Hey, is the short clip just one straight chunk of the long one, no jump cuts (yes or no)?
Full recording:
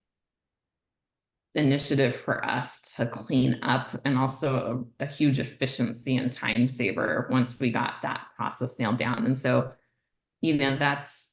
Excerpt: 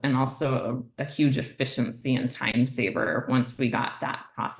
yes